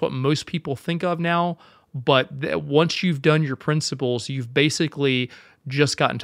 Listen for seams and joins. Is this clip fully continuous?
yes; 0 cuts

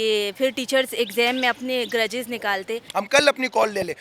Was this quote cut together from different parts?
yes; 1 cut; at 2.8 s

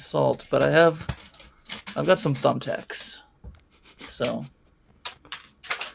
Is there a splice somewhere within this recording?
no; 0 cuts

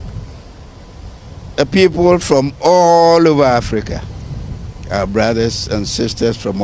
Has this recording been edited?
no; 0 cuts

